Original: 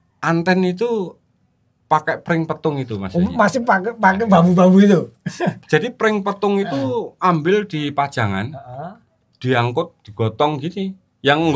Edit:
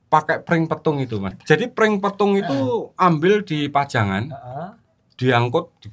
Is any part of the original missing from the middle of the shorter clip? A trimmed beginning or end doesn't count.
yes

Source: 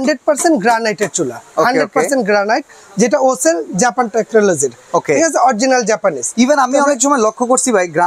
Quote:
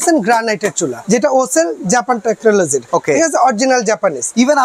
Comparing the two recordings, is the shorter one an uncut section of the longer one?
no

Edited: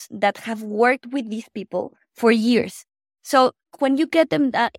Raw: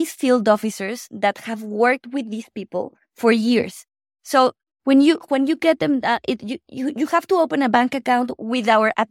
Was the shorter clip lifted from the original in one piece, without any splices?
no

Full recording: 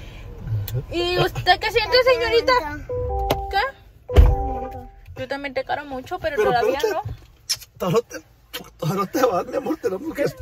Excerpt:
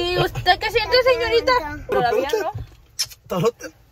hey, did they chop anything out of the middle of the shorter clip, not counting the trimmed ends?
yes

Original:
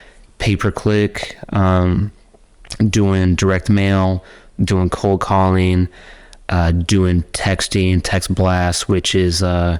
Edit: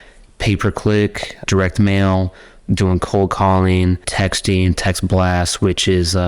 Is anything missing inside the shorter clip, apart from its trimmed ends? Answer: yes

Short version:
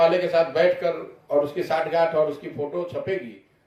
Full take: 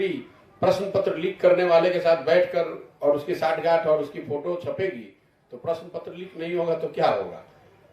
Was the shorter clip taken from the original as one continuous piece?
yes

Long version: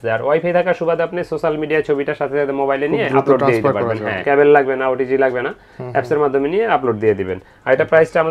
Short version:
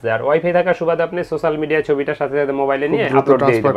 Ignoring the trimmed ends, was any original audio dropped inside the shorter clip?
no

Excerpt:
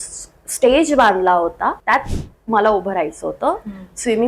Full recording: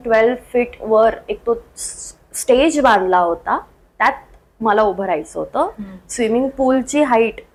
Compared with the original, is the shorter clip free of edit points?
no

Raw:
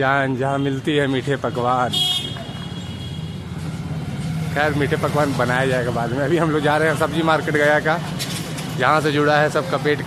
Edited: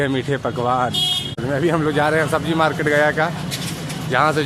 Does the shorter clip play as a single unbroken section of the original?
no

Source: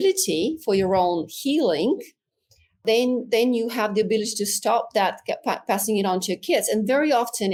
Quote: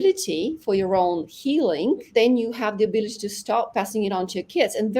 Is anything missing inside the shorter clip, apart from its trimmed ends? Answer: yes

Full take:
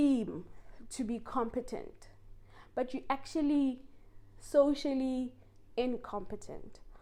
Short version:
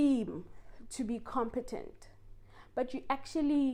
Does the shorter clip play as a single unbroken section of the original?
yes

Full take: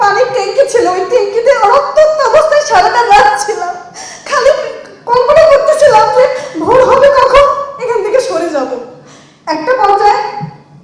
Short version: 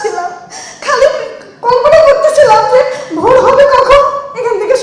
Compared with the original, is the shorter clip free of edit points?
yes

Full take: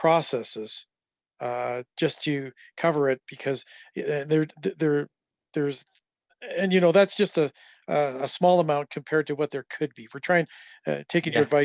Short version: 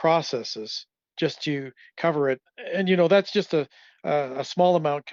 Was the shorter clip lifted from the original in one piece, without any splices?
no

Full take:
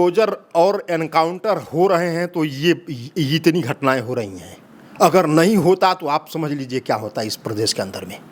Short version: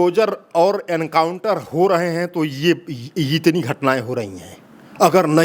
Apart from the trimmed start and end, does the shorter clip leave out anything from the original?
no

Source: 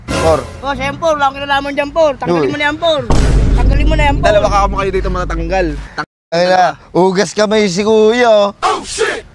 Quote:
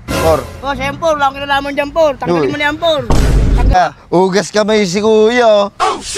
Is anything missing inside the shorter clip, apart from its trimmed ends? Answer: yes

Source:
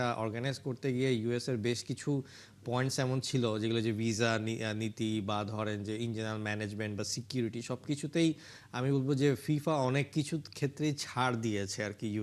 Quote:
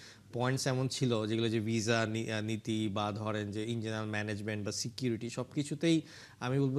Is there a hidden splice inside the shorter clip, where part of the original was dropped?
no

